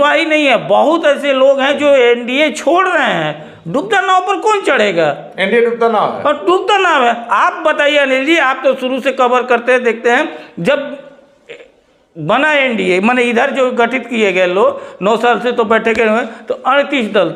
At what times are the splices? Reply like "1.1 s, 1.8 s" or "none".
none

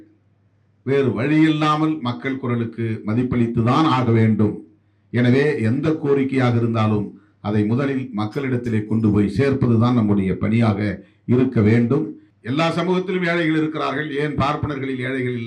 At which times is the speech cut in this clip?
12.2 s

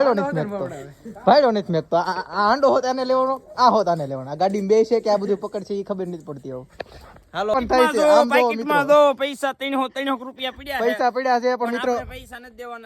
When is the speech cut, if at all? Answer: 7.5 s, 11.0 s

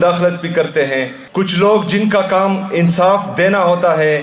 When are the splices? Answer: 1.2 s

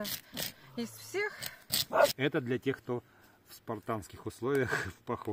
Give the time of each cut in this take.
2.1 s

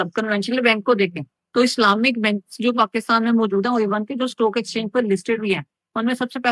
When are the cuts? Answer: none

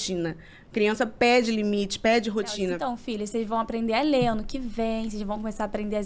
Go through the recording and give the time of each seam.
2.8 s

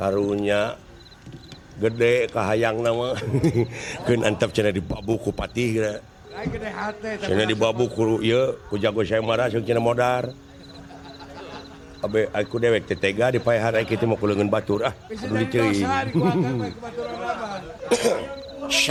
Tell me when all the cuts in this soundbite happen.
none

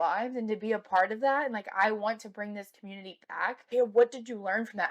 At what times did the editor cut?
3.7 s

